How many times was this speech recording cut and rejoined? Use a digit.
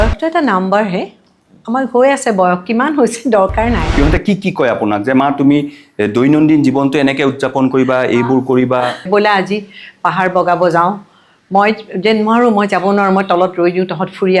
2